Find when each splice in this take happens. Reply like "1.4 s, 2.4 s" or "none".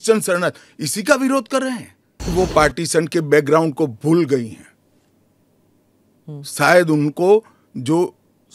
2.3 s